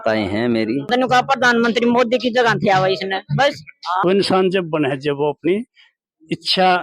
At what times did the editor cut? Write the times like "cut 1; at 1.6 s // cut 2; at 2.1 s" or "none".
cut 1; at 0.9 s // cut 2; at 4.0 s

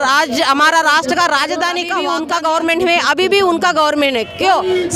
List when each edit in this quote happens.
cut 1; at 2.0 s

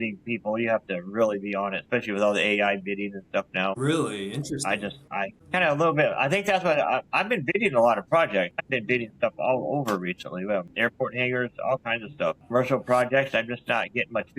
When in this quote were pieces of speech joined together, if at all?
cut 1; at 5.0 s // cut 2; at 8.6 s // cut 3; at 10.7 s // cut 4; at 12.4 s

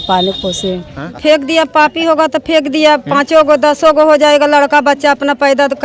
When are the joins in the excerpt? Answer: cut 1; at 1.1 s

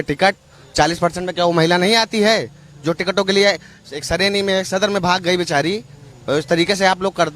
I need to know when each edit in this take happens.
none

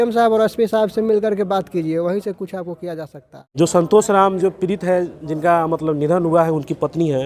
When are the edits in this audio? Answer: none

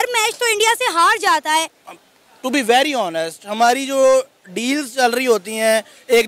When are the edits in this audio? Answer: cut 1; at 1.8 s

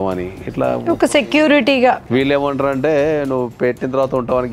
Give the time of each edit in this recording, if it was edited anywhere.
cut 1; at 2.0 s

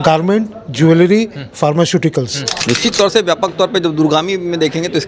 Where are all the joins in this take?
cut 1; at 2.5 s

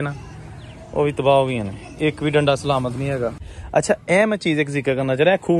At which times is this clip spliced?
cut 1; at 3.5 s

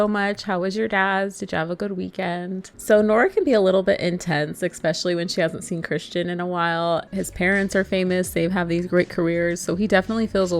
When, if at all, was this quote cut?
cut 1; at 2.7 s // cut 2; at 7.1 s

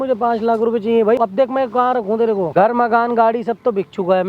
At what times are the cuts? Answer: cut 1; at 1.2 s // cut 2; at 2.5 s

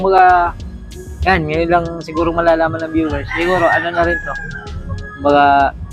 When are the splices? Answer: none

